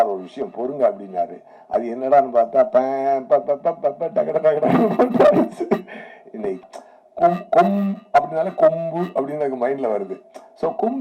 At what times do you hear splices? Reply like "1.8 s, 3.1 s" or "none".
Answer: 6.6 s